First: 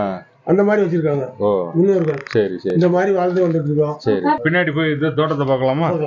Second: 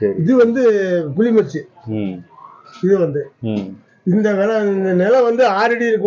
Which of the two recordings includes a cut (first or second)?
first